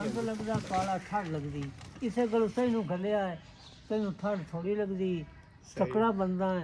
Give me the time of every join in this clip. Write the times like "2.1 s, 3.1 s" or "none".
none